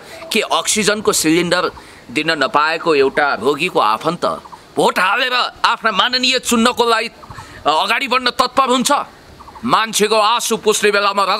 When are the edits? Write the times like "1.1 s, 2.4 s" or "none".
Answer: none

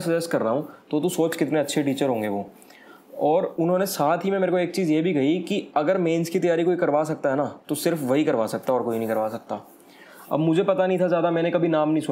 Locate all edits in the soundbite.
none

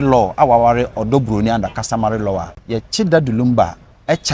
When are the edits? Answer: 2.5 s

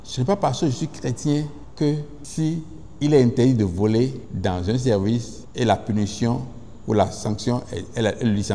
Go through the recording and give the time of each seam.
1.6 s, 2.2 s, 4.3 s, 5.4 s

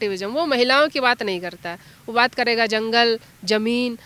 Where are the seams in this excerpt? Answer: none

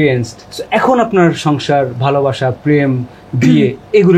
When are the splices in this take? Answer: none

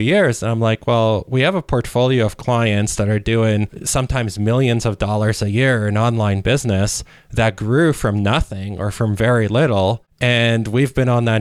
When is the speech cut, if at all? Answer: 10.1 s

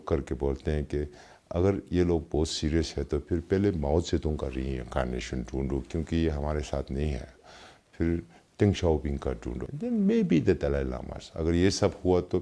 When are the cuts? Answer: none

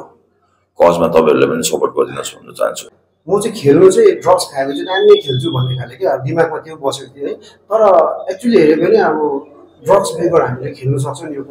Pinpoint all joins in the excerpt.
2.9 s

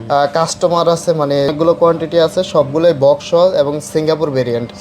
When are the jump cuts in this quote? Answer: 1.5 s

